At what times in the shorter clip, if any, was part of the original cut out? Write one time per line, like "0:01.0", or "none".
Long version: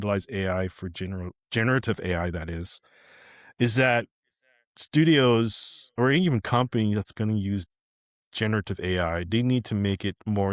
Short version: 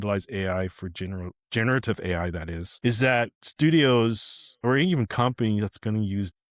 0:02.6
0:03.4